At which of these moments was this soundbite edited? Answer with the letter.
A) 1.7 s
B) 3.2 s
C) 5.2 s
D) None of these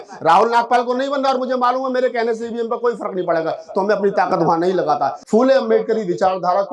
C